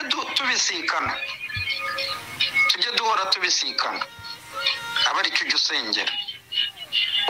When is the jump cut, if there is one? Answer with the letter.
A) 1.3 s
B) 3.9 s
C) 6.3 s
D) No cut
B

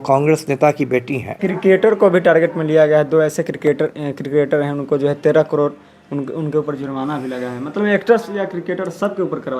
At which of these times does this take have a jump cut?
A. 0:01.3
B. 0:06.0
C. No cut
A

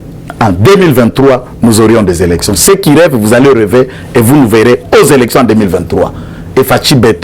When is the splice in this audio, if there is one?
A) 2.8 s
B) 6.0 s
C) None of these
C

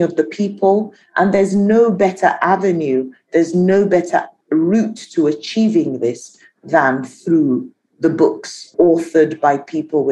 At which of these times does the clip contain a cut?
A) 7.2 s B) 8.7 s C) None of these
B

